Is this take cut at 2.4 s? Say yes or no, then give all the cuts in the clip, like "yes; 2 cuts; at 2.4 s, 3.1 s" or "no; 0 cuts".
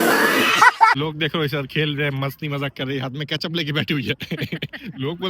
no; 1 cut; at 1.0 s